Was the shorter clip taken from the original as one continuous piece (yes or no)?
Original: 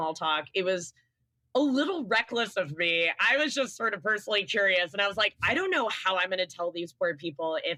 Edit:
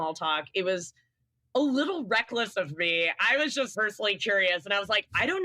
no